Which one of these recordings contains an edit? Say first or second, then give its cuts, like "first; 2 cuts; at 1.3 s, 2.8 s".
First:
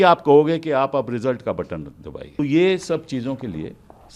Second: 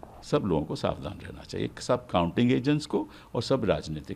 first; 1 cut; at 2.4 s